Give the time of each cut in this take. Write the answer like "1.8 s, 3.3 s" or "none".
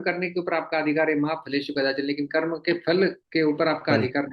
3.2 s

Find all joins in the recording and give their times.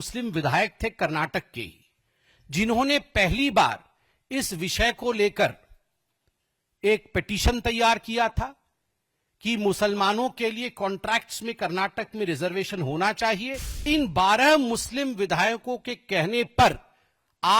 13.8 s

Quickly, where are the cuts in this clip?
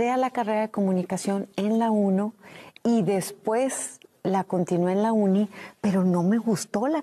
none

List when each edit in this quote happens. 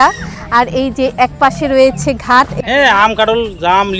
2.5 s

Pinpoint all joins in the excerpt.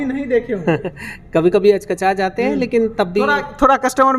none

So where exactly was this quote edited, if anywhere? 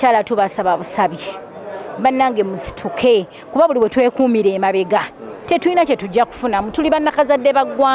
none

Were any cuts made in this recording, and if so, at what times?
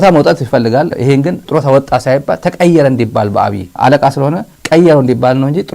0.9 s

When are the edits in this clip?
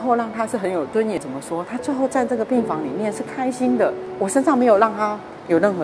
1.2 s, 4.0 s

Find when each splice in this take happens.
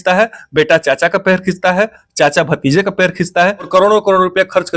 3.7 s

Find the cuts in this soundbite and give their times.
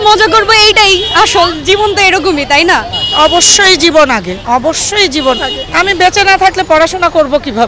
2.8 s, 4.3 s, 5.6 s

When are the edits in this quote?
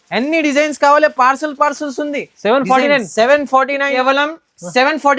4.0 s

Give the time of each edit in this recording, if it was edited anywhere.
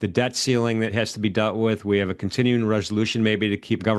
0.9 s

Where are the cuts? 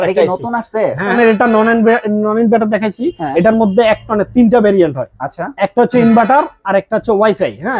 1.2 s

